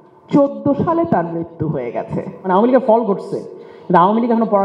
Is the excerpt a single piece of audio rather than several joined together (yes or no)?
no